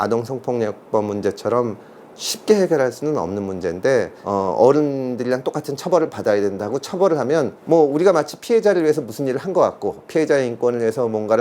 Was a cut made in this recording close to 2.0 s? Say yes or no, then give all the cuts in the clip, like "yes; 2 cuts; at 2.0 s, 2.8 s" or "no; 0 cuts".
no; 1 cut; at 4.2 s